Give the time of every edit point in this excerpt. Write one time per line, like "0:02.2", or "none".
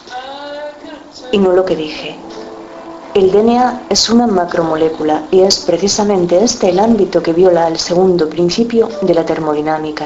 none